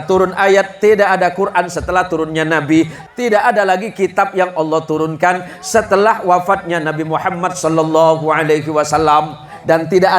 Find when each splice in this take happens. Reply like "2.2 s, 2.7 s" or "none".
3.0 s